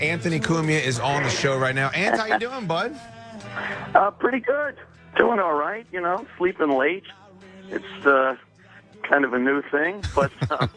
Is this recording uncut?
yes; 0 cuts

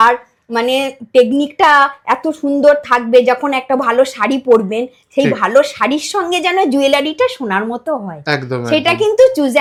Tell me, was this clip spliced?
no; 0 cuts

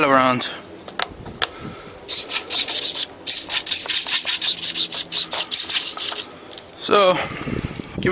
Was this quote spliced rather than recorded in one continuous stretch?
yes; 1 cut; at 1.1 s

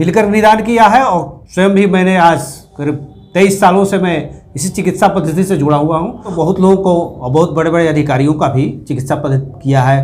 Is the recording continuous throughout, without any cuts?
no; 1 cut; at 6.3 s

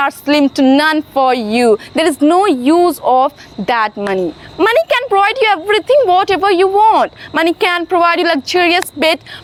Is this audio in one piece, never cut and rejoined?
yes; 0 cuts

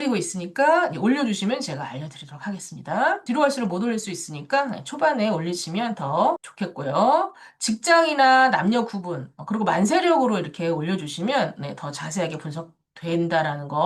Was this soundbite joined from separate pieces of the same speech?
no; 0 cuts

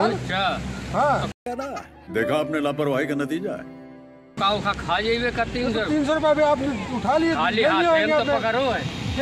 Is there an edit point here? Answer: no; 0 cuts

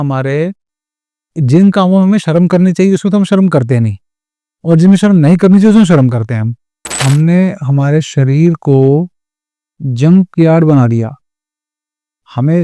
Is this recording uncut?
no; 1 cut; at 7.0 s

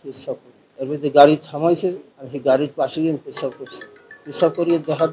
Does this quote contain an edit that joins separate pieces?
yes; 1 cut; at 2.0 s

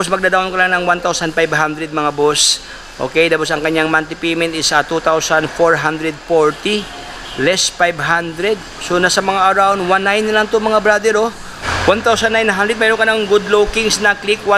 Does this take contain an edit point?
yes; 1 cut; at 11.6 s

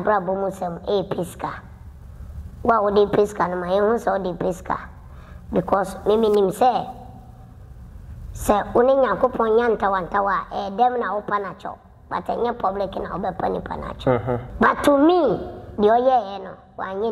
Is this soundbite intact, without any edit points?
no; 1 cut; at 14.5 s

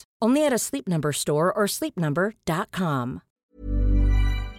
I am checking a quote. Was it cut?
yes; 1 cut; at 3.4 s

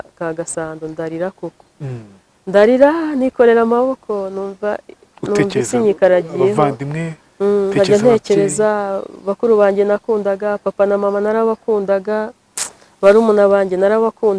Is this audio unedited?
yes; 0 cuts

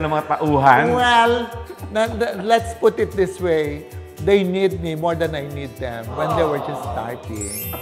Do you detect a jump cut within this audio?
no; 0 cuts

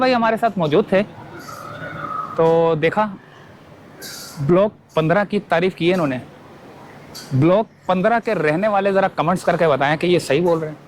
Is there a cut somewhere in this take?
no; 0 cuts

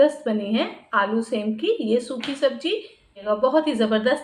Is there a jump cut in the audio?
yes; 1 cut; at 3.2 s

